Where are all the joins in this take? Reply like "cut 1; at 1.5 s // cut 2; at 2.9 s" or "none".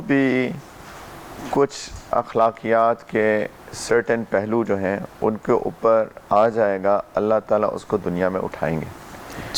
none